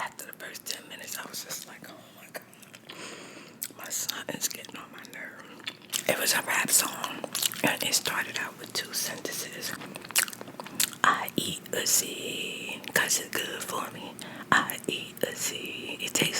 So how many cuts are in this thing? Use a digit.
2